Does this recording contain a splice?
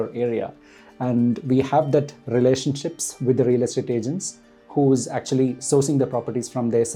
no; 0 cuts

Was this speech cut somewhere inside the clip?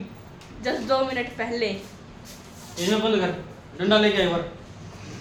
no; 0 cuts

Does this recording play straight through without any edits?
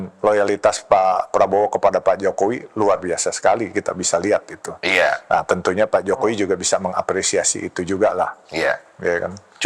yes; 0 cuts

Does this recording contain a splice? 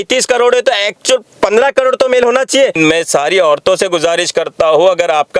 yes; 1 cut; at 2.7 s

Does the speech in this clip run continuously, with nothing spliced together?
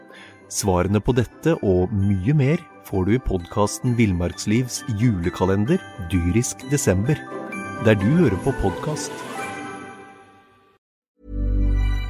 no; 1 cut; at 11.0 s

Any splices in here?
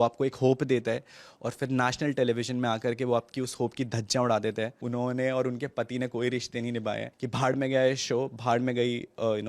yes; 2 cuts; at 4.8 s, 7.1 s

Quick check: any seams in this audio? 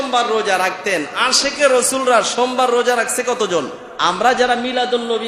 yes; 1 cut; at 3.8 s

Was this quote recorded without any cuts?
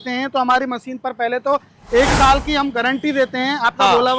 yes; 0 cuts

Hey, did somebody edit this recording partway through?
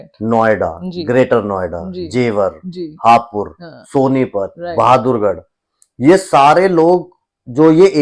no; 0 cuts

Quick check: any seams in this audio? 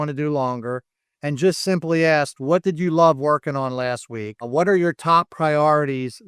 yes; 1 cut; at 4.4 s

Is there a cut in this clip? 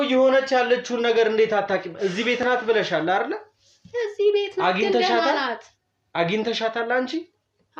no; 0 cuts

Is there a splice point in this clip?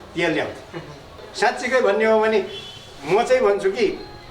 yes; 1 cut; at 1.2 s

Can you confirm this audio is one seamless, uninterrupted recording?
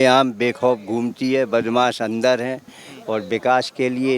yes; 0 cuts

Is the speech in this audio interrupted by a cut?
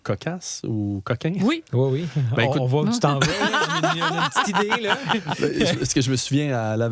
no; 0 cuts

